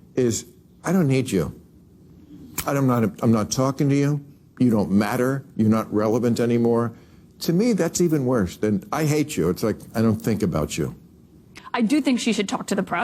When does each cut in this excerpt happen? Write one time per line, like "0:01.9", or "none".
0:11.6